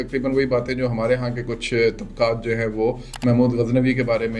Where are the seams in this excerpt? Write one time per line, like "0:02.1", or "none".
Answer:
none